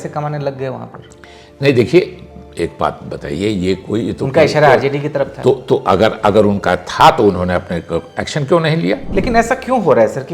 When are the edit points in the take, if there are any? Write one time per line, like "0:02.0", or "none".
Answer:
0:09.1